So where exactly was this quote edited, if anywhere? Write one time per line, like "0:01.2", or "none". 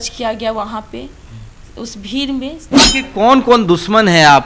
0:02.7